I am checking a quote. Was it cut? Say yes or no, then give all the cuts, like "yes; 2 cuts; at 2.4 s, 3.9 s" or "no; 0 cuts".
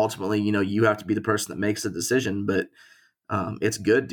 no; 0 cuts